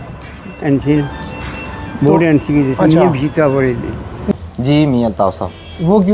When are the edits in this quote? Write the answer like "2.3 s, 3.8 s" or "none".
4.3 s